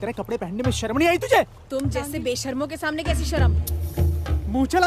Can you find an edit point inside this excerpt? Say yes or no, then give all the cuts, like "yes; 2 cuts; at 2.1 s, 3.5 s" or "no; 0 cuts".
no; 0 cuts